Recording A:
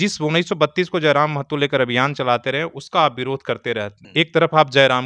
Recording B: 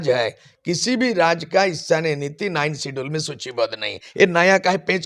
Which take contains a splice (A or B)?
A